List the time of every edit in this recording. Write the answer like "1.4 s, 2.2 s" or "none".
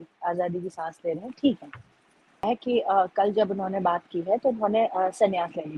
2.4 s